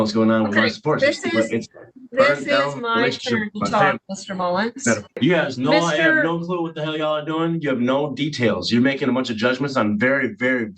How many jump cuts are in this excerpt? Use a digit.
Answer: 1